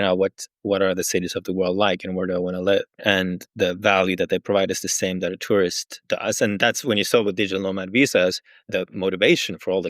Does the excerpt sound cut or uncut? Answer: cut